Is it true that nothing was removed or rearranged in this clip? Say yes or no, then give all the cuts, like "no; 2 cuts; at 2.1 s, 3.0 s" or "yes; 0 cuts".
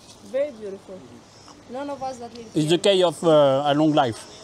yes; 0 cuts